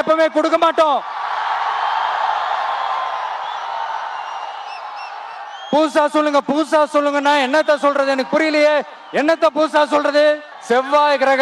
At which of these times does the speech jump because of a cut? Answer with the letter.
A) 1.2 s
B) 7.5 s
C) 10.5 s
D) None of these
C